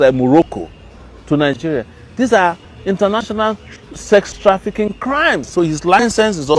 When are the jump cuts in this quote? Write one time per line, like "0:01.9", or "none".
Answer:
0:05.5